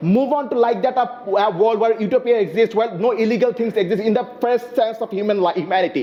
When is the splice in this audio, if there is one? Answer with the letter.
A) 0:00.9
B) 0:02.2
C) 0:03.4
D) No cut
D